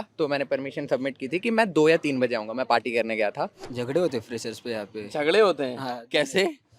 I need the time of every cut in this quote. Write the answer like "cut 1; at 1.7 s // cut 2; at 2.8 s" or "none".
cut 1; at 3.6 s